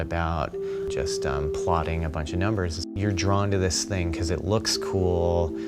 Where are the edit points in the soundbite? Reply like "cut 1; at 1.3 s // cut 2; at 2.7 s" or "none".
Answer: cut 1; at 1.7 s